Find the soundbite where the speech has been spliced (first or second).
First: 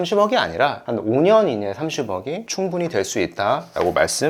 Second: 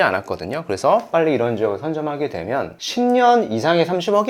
second